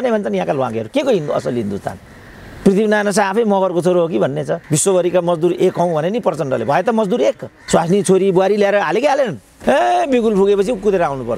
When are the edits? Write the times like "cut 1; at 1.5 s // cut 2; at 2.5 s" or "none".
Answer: cut 1; at 4.6 s // cut 2; at 7.5 s // cut 3; at 9.5 s